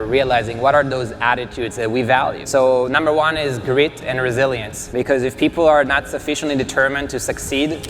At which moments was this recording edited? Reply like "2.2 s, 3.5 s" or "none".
2.4 s, 4.7 s